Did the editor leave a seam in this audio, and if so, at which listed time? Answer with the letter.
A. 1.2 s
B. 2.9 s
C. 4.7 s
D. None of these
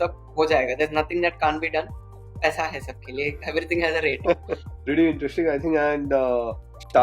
C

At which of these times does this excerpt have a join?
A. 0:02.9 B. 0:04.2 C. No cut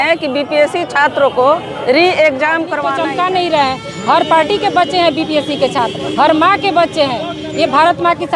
A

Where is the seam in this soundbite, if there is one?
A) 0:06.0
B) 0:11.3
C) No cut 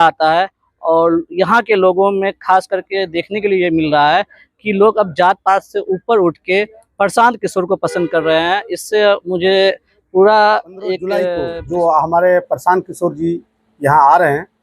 B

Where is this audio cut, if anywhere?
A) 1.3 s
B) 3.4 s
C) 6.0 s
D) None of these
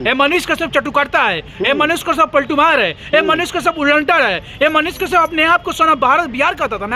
D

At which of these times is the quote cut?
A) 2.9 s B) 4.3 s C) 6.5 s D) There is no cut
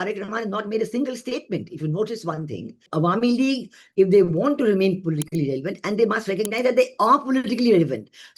A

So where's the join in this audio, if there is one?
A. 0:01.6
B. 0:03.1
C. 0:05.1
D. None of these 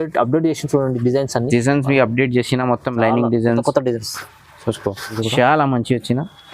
C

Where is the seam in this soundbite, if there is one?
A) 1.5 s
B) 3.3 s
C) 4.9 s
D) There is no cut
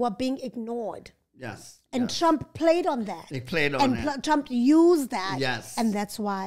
D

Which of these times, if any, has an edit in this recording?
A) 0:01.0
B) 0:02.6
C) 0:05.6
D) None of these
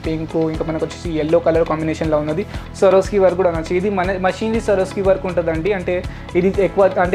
B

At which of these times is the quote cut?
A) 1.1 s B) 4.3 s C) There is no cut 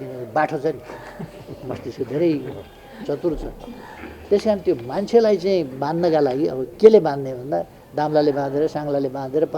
C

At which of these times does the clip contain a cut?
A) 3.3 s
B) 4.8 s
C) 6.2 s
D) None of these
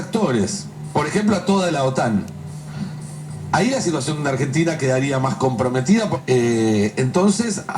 C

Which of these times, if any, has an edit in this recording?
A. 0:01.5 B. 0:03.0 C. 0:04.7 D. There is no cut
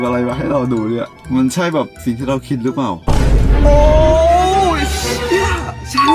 B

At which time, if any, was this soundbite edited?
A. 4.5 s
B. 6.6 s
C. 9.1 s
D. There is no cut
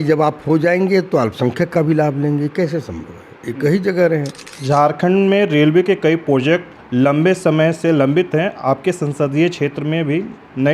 A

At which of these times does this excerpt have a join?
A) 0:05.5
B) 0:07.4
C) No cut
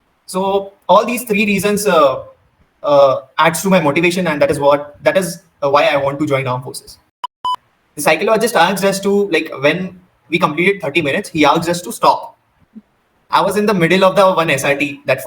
B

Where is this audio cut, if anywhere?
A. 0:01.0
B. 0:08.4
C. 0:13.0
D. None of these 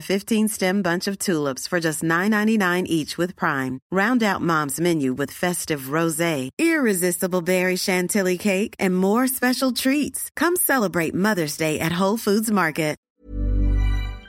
C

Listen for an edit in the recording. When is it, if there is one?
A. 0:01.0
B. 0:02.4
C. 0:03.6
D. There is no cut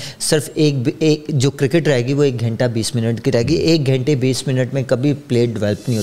D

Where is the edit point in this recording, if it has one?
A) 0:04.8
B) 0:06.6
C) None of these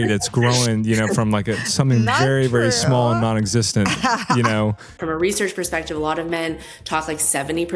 A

